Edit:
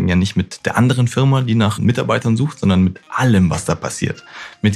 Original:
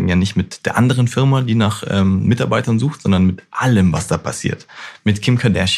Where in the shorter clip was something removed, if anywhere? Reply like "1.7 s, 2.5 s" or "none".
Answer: 1.8 s